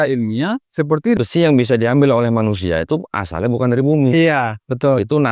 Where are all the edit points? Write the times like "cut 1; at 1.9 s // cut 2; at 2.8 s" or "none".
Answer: cut 1; at 1.2 s